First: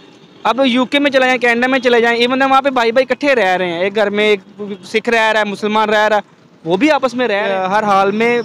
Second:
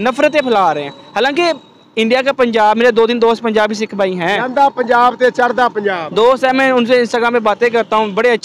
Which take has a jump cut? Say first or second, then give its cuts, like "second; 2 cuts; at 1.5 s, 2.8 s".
first; 1 cut; at 7.4 s